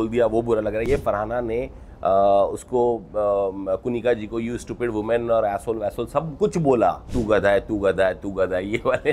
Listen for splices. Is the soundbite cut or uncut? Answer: cut